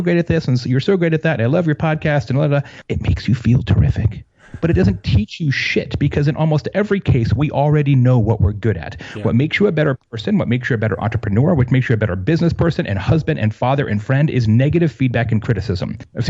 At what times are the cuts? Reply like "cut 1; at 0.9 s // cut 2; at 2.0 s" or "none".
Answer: cut 1; at 2.8 s